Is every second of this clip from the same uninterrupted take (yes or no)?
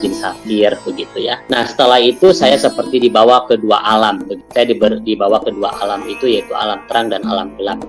no